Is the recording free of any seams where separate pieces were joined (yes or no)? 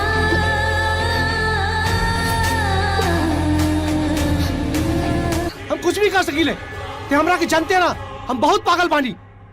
no